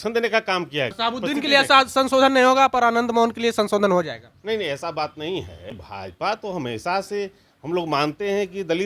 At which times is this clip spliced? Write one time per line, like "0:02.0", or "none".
0:00.9
0:05.8